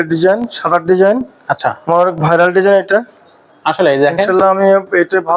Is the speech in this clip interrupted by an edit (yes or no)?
no